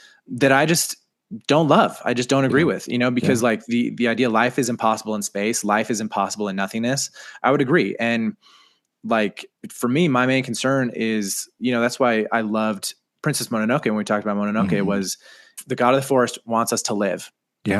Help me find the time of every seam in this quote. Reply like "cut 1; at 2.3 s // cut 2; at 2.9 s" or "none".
none